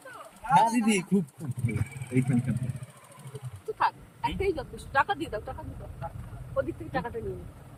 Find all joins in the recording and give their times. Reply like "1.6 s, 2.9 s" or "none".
none

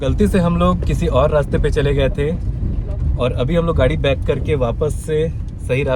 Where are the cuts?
none

